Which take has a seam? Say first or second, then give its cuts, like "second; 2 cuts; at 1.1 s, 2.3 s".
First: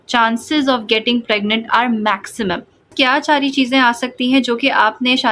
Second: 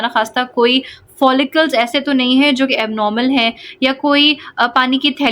first; 1 cut; at 2.9 s